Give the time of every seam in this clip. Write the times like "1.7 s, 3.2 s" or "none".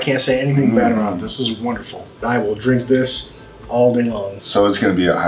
2.2 s, 4.3 s